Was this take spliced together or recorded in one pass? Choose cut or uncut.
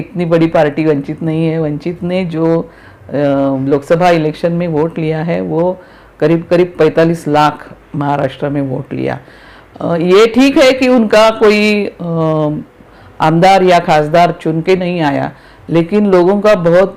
uncut